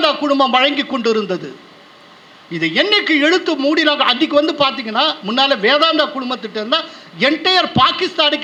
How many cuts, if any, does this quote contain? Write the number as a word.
zero